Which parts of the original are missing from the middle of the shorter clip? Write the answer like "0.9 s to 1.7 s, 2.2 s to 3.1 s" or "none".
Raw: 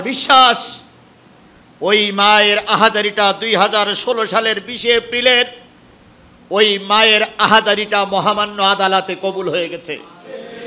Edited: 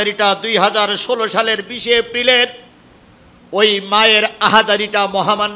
none